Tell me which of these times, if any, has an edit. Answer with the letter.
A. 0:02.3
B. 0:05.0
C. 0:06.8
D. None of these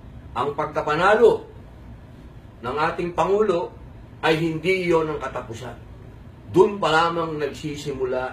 D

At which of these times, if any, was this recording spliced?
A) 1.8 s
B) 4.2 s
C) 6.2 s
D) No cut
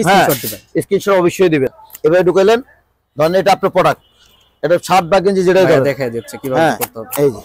A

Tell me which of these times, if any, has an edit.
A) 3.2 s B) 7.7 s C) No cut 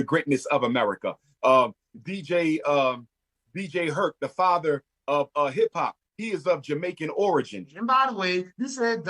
B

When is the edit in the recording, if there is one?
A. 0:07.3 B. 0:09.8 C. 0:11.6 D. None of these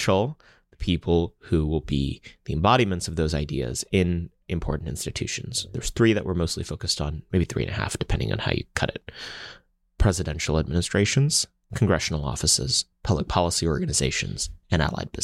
D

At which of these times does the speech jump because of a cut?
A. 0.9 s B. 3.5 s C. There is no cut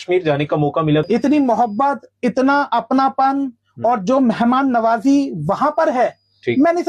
A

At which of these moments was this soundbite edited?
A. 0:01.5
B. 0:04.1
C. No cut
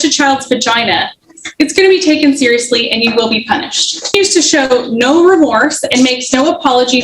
B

